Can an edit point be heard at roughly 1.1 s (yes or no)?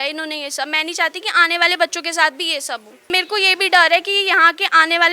no